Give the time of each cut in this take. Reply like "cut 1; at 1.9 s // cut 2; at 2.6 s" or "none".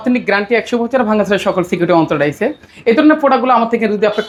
none